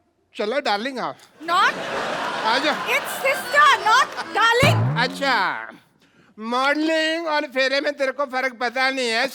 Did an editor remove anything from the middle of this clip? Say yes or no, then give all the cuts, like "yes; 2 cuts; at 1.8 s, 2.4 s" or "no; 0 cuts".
no; 0 cuts